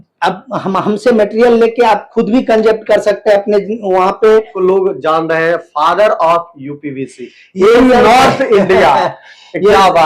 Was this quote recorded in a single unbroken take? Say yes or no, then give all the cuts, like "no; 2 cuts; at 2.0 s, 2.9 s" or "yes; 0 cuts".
no; 1 cut; at 4.5 s